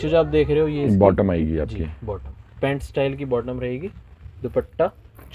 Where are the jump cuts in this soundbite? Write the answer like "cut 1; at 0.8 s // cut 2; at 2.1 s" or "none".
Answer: none